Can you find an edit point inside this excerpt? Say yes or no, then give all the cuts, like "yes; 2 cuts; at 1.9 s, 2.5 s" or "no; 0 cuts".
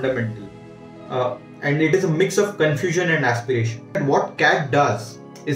yes; 1 cut; at 4.0 s